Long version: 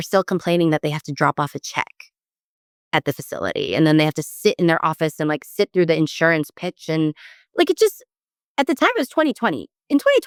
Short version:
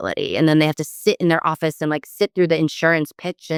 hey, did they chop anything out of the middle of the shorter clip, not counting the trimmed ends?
no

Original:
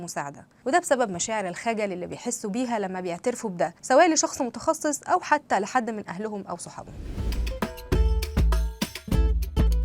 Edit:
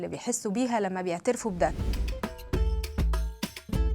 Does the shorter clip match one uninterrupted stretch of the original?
no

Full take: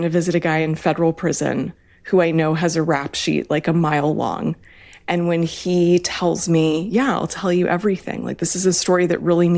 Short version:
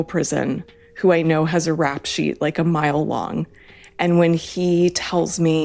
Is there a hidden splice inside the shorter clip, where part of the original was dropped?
no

